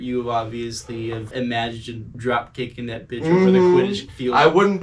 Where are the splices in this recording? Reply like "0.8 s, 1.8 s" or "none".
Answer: none